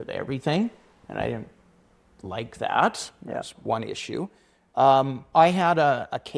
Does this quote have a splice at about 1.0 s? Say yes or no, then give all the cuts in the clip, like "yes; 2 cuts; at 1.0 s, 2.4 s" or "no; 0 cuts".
no; 0 cuts